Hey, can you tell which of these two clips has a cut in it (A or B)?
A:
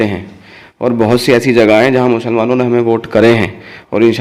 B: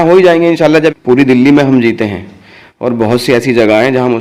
B